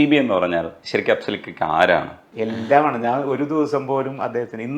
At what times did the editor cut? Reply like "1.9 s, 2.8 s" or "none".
2.2 s